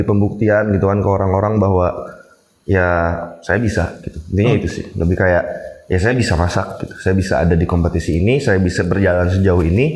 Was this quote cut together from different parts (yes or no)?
no